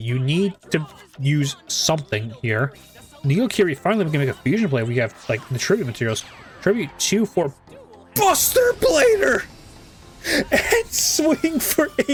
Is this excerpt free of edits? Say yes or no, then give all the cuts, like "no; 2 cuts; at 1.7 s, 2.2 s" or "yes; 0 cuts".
yes; 0 cuts